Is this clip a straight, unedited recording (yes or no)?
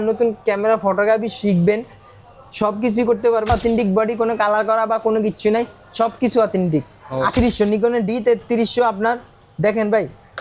no